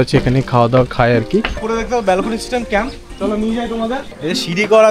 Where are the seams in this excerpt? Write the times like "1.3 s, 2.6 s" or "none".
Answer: 1.6 s, 4.1 s

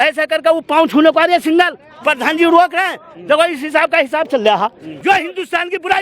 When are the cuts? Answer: 4.9 s

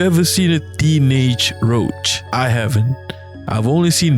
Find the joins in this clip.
2.1 s

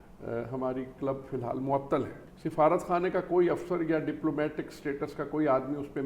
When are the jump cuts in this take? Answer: 2.2 s

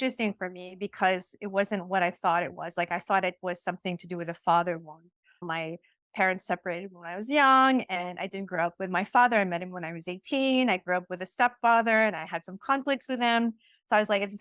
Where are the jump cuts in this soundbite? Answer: 5.4 s

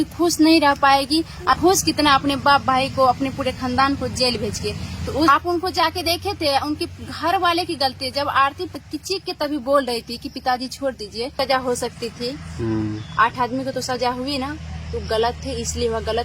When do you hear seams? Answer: 1.5 s, 5.3 s, 8.8 s, 11.3 s

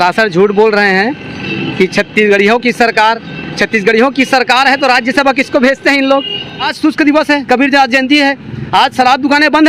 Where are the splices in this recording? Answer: 6.7 s

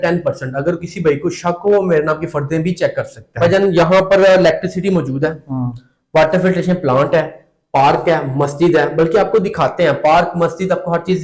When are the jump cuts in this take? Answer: 3.3 s

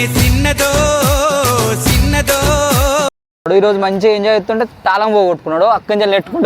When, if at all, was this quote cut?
3.4 s

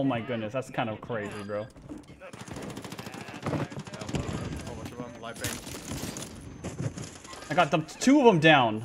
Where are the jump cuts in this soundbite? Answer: 2.1 s

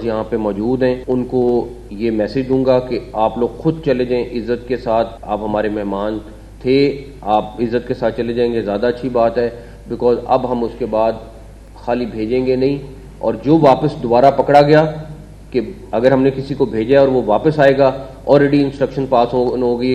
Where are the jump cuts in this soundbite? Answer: 1.0 s, 5.2 s

